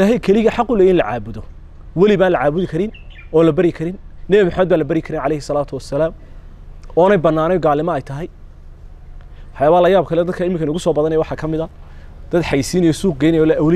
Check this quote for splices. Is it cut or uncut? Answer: uncut